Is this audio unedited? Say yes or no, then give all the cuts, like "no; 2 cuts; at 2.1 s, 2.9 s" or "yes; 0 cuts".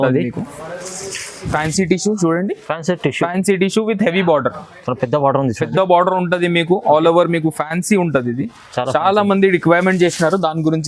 no; 1 cut; at 1.5 s